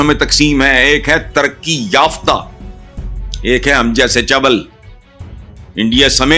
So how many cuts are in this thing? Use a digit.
0